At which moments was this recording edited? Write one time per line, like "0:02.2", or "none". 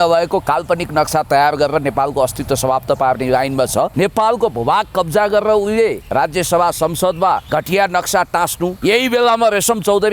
0:03.9
0:06.0
0:07.4
0:08.8